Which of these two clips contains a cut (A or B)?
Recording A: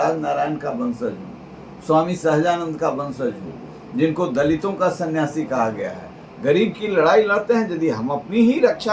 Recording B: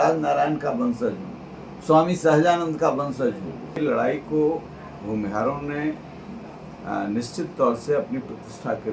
B